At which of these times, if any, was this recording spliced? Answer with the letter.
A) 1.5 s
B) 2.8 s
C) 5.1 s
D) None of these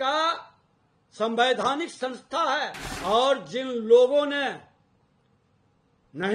B